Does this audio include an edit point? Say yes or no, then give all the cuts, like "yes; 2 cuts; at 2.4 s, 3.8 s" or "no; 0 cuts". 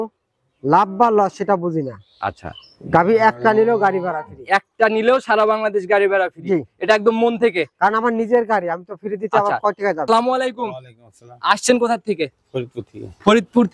yes; 1 cut; at 10.0 s